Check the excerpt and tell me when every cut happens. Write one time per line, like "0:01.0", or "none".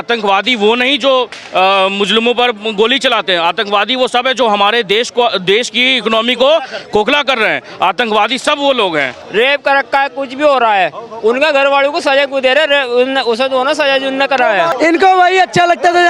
0:09.2
0:14.7